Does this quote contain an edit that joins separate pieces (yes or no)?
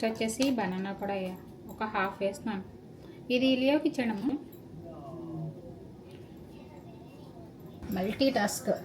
yes